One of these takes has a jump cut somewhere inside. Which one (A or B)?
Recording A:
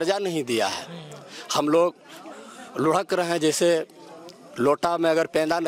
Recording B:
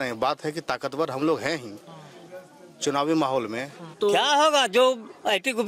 B